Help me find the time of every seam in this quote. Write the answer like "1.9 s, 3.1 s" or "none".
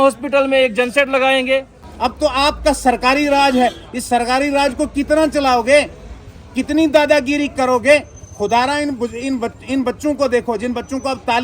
1.8 s